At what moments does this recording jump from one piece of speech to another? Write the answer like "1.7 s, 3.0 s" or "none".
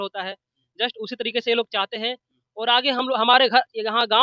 none